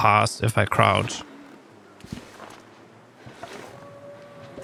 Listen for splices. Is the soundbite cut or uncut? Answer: uncut